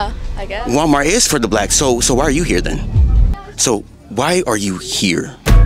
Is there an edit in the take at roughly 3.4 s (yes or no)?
yes